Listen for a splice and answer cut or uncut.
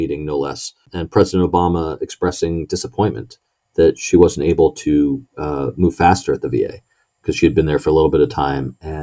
cut